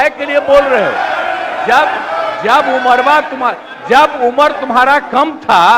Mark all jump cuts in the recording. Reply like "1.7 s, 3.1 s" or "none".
none